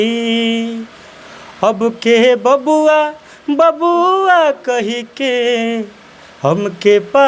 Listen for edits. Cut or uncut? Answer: uncut